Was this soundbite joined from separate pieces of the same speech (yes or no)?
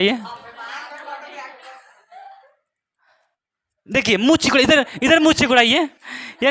no